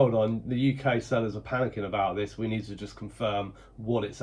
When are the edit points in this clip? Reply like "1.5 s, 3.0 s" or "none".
none